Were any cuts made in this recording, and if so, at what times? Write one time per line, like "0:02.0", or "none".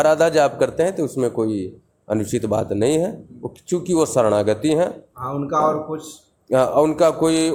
none